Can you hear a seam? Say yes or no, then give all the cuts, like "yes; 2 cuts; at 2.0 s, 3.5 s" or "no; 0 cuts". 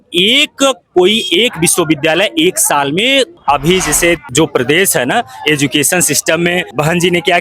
yes; 1 cut; at 3.4 s